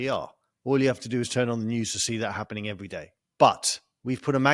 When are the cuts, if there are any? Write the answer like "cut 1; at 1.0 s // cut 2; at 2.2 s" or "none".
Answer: cut 1; at 3.2 s